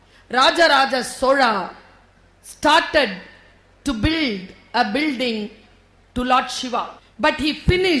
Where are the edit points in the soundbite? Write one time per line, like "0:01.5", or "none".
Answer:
0:07.0